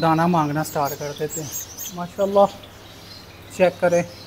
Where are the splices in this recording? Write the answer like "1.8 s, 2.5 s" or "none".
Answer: 2.1 s